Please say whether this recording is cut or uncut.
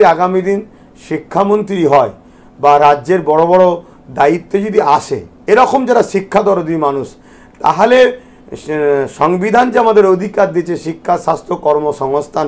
uncut